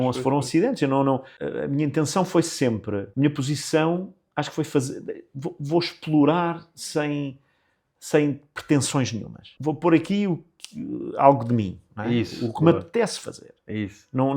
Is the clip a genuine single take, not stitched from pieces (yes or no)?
no